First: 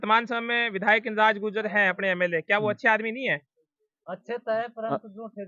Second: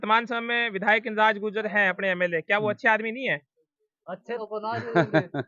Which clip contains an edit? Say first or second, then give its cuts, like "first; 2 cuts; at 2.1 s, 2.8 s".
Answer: second; 1 cut; at 4.4 s